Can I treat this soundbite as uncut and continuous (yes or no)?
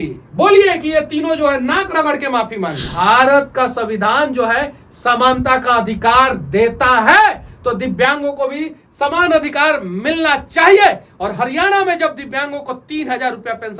no